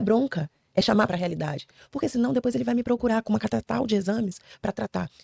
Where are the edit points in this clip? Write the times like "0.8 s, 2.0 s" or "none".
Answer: 1.1 s